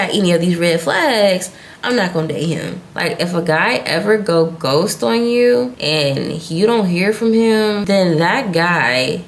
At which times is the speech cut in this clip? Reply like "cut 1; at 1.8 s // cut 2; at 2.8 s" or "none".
cut 1; at 2.9 s // cut 2; at 7.8 s

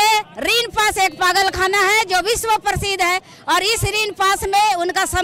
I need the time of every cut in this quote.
none

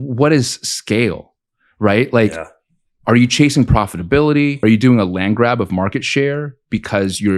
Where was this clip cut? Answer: cut 1; at 4.6 s

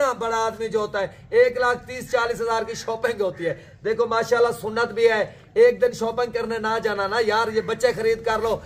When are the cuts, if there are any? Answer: none

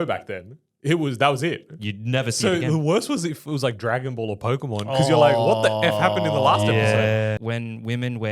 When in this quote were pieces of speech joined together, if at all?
cut 1; at 7.4 s

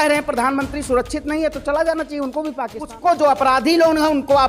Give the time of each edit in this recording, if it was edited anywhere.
cut 1; at 2.9 s

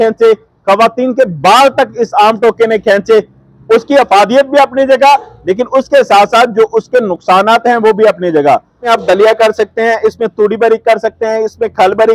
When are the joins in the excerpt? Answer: cut 1; at 8.8 s

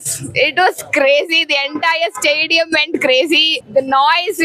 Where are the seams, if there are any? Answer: cut 1; at 3.6 s

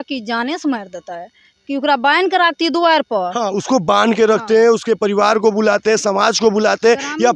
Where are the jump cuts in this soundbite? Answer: none

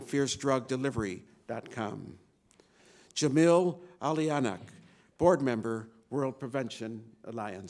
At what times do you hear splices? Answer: none

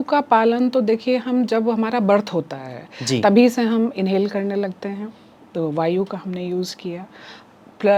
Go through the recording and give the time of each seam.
none

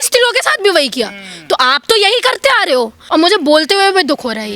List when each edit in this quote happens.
cut 1; at 3.0 s

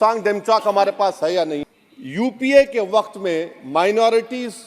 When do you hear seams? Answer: cut 1; at 1.6 s

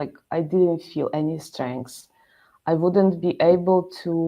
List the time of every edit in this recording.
none

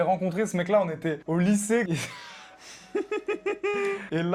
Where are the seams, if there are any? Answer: none

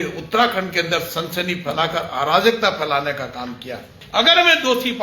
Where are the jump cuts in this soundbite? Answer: cut 1; at 4.0 s

